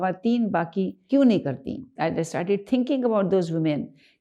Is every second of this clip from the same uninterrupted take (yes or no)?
no